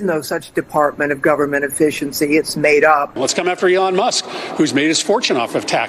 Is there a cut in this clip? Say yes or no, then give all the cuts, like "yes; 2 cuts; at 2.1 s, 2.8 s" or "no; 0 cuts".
yes; 1 cut; at 3.2 s